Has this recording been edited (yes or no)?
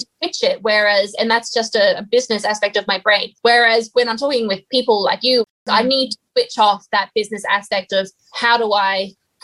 yes